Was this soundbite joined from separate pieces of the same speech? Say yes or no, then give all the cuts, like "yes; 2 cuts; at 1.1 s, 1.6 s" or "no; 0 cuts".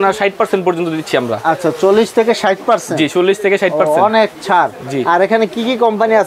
no; 0 cuts